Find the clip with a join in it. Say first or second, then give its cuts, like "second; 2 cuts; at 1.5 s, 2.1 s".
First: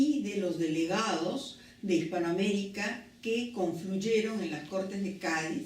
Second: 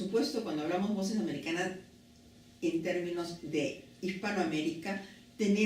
first; 1 cut; at 2.8 s